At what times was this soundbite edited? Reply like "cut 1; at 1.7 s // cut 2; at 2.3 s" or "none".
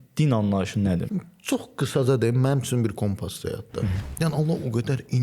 cut 1; at 1.1 s // cut 2; at 4.0 s